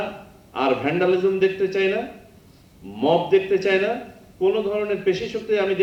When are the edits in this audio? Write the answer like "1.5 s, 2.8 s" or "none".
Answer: none